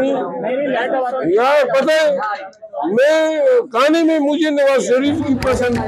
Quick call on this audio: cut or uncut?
uncut